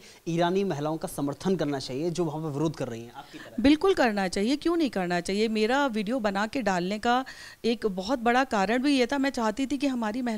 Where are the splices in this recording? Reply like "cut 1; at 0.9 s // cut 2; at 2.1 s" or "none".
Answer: none